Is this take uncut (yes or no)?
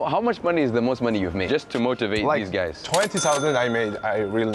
no